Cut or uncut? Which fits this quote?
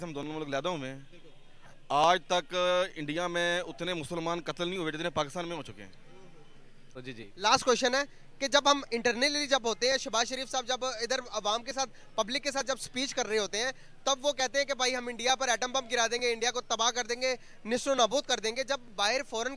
cut